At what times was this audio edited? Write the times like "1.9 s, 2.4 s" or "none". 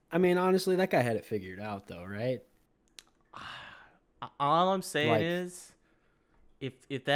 none